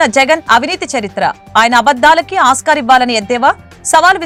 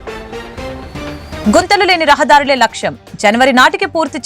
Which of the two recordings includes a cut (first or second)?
second